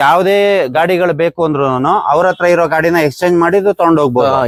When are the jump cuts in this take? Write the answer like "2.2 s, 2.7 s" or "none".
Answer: none